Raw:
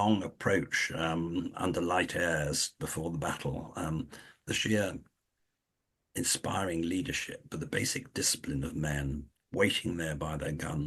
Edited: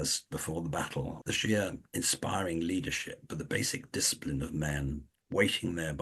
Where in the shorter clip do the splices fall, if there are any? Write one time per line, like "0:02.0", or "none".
0:01.2
0:01.8

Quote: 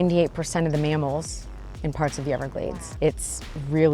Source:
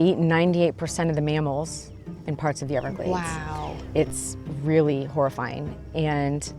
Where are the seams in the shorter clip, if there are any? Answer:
0:02.7

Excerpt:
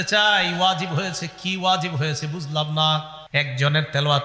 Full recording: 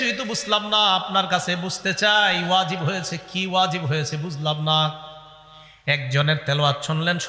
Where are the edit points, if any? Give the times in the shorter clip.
0:03.2

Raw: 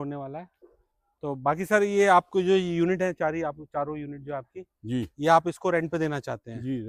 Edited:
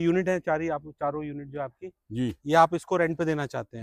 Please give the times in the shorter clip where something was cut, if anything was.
none

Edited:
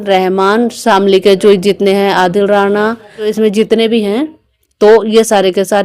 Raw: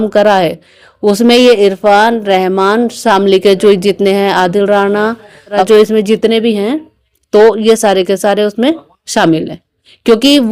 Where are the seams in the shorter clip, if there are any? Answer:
0:03.3

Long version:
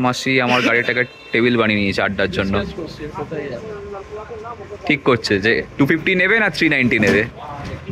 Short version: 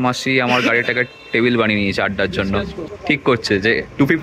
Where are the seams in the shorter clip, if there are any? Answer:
0:02.9

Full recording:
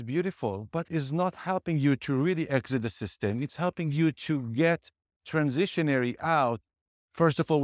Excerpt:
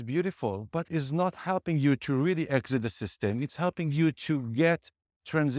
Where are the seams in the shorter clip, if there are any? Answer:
none

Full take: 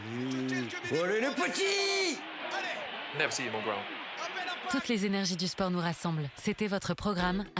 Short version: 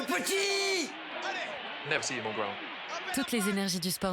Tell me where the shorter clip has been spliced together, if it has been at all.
0:03.2

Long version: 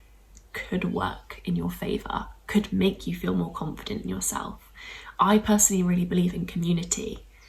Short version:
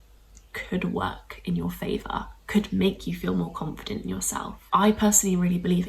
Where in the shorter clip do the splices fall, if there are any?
0:04.6

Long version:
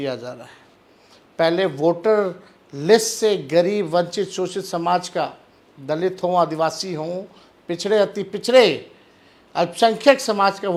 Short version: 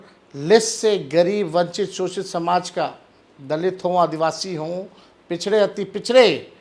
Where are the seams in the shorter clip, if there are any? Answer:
none

